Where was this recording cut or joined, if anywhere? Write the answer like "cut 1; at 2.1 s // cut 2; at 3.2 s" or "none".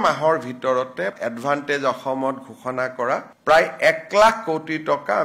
cut 1; at 1.1 s